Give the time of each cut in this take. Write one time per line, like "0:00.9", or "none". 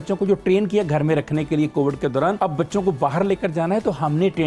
0:02.4